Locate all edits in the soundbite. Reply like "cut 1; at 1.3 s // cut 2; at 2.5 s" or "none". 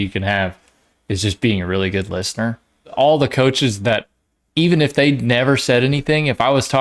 cut 1; at 2.9 s